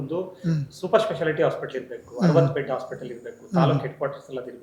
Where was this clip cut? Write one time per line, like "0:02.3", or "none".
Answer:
none